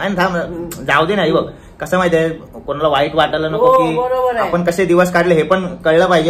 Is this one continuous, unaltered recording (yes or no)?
yes